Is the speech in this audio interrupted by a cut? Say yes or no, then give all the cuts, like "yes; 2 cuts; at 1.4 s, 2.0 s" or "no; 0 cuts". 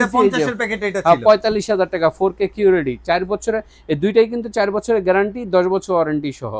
no; 0 cuts